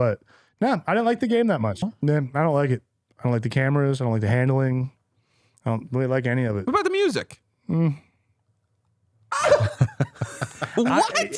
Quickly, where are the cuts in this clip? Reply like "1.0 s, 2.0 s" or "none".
1.7 s